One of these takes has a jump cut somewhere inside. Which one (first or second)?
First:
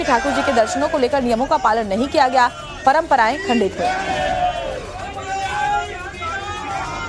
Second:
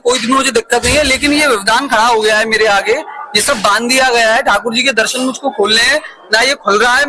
first